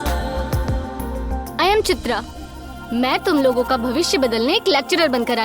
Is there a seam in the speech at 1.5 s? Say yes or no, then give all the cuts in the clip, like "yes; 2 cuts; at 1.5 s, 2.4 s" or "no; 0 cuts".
yes; 1 cut; at 1.5 s